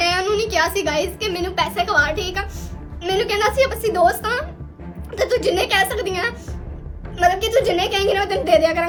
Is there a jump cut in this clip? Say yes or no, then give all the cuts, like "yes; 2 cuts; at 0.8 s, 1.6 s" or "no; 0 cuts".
no; 0 cuts